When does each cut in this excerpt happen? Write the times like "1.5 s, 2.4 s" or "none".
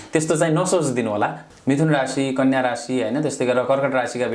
1.4 s